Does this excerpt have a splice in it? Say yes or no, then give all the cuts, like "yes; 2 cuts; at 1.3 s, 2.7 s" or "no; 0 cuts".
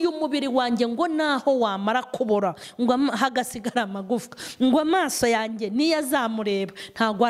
no; 0 cuts